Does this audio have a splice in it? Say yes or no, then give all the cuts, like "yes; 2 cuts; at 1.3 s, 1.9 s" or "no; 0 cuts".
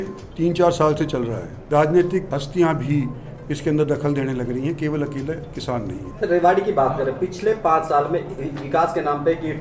yes; 3 cuts; at 1.6 s, 2.3 s, 6.0 s